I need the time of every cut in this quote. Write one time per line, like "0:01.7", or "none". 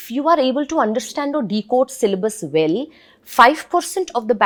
none